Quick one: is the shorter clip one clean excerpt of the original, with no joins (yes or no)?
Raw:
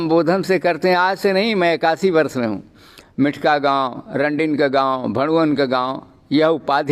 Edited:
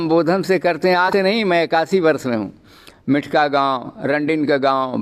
no